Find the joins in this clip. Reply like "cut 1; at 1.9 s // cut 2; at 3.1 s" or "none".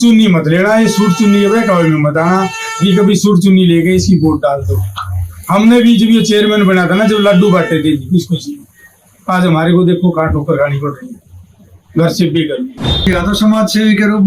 cut 1; at 13.1 s